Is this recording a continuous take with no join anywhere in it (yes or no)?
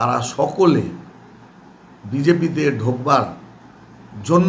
yes